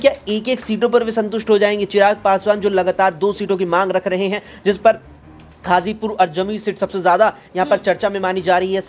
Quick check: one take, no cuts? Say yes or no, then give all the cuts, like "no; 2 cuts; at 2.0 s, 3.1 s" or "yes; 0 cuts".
yes; 0 cuts